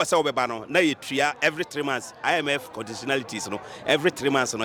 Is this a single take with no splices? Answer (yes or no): yes